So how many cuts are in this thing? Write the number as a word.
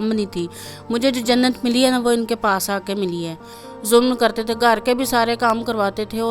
one